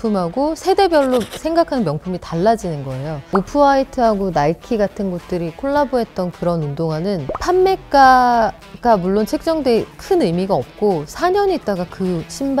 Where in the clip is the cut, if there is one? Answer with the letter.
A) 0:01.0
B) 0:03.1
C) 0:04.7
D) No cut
B